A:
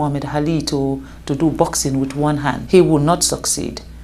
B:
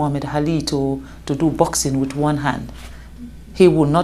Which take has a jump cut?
A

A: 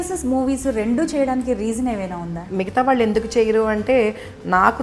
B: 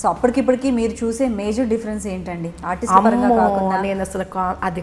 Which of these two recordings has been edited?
A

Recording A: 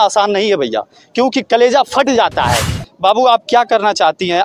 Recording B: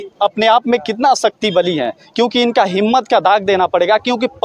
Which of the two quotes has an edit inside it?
A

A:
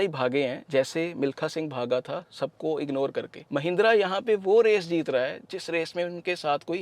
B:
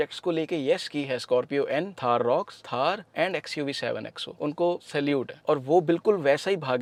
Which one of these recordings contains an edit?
A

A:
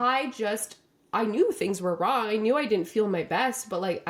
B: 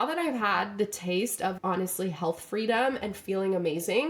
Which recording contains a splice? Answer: B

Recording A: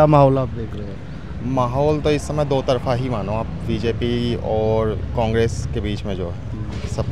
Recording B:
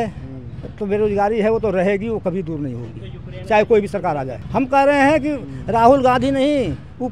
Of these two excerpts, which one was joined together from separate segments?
B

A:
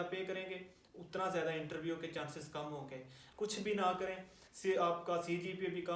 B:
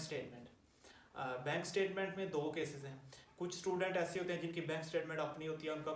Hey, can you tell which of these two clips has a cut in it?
A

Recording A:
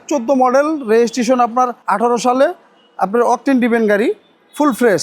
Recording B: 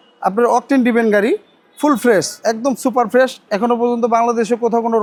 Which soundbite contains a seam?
A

